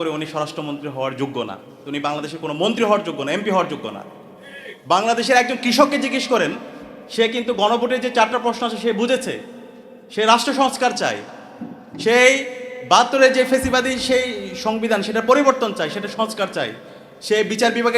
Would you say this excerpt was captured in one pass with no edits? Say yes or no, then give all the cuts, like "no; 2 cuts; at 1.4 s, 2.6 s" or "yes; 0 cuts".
yes; 0 cuts